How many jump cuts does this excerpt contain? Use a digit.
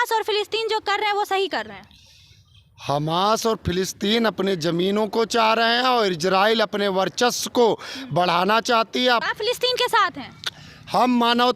1